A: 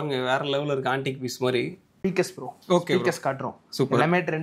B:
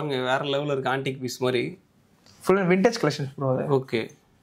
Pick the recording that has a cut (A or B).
A